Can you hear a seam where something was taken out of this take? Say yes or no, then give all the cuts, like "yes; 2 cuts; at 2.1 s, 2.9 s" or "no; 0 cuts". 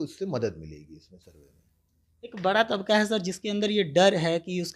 no; 0 cuts